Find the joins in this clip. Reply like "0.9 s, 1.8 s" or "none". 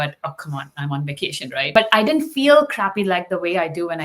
1.7 s